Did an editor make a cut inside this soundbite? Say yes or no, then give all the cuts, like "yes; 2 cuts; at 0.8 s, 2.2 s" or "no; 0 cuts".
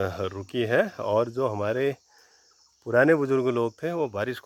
no; 0 cuts